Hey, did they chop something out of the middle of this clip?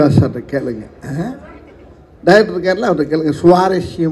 no; 0 cuts

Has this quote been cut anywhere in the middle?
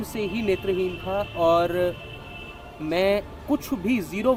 no; 0 cuts

